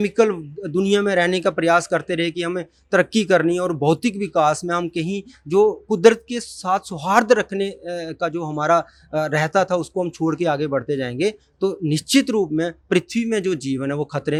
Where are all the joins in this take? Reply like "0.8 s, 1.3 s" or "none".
none